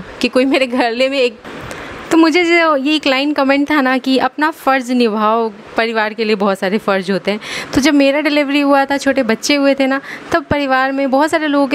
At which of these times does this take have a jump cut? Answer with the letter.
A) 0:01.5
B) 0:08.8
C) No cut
A